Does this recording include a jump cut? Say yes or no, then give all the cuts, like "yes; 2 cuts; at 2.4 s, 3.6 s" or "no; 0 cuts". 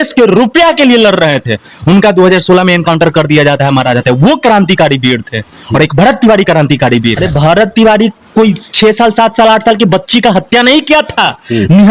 yes; 1 cut; at 7.2 s